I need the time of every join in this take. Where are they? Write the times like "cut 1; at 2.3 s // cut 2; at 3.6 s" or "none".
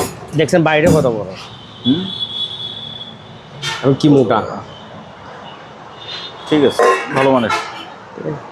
none